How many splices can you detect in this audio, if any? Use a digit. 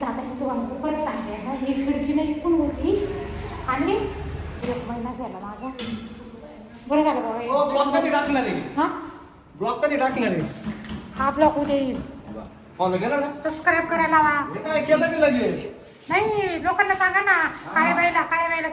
1